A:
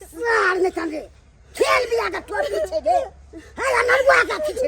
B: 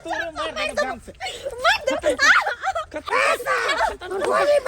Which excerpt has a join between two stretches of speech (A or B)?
B